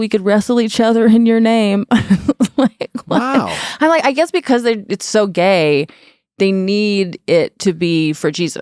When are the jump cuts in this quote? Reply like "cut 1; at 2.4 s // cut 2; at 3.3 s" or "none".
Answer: none